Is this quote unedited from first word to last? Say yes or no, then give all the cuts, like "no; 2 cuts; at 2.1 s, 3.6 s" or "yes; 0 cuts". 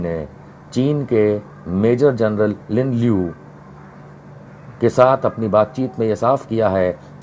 yes; 0 cuts